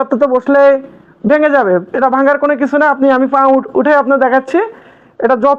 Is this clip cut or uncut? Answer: uncut